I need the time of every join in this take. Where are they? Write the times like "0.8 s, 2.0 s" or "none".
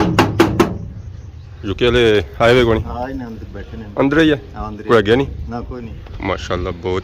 1.6 s, 6.1 s